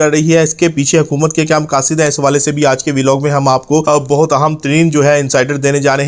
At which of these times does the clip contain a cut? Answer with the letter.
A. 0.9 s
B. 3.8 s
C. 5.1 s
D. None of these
B